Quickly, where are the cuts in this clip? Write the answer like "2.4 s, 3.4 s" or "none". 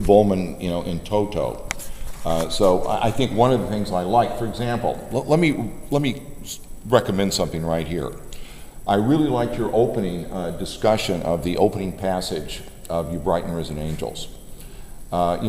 14.4 s